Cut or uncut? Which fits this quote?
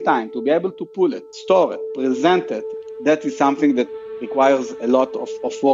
cut